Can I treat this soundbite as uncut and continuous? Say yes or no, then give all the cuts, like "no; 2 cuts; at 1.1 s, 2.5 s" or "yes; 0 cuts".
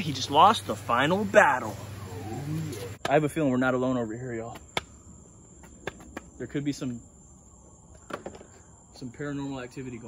no; 1 cut; at 2.9 s